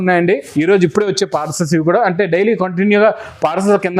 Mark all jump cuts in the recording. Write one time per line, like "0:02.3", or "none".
none